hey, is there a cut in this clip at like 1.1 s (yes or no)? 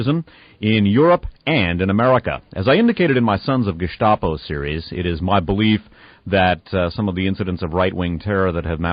yes